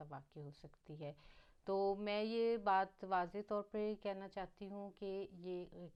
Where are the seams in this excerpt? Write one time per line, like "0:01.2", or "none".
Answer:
none